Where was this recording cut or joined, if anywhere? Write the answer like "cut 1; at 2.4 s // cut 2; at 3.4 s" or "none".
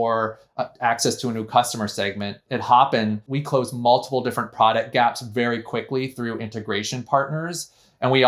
cut 1; at 2.4 s // cut 2; at 3.3 s